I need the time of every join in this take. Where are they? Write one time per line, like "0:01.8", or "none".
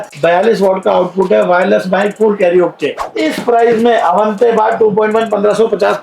0:03.0